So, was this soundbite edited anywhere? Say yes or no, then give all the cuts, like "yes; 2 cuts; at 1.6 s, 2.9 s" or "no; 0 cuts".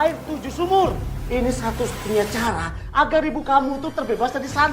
no; 0 cuts